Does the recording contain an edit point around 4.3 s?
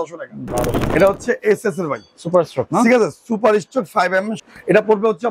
yes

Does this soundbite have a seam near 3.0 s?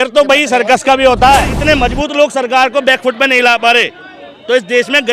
no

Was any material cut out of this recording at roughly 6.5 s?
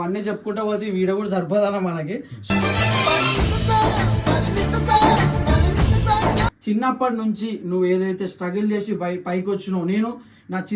yes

